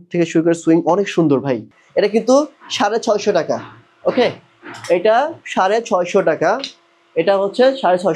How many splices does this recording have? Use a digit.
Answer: 1